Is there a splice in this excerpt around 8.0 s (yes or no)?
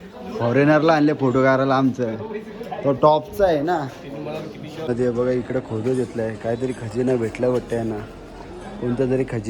no